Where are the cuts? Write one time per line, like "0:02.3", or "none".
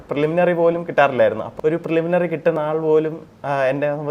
0:01.5